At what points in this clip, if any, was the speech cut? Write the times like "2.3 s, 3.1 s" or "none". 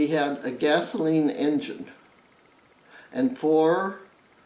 none